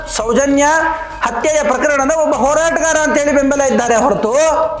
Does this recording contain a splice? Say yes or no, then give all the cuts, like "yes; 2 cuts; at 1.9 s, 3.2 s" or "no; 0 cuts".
no; 0 cuts